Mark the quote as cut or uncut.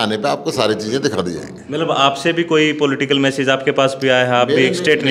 uncut